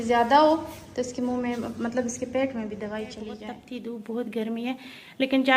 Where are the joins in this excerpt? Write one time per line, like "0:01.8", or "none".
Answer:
0:03.6

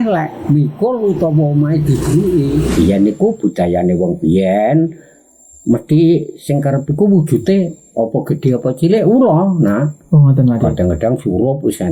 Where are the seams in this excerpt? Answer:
0:02.7

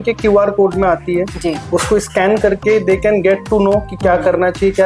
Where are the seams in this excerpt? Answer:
none

